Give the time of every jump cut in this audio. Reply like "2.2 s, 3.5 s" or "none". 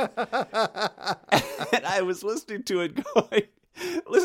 1.2 s